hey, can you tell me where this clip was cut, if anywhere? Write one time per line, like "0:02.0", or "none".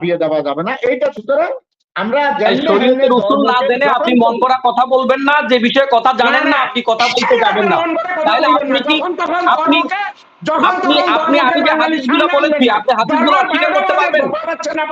0:01.1